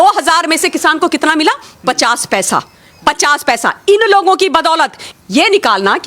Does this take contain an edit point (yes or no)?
yes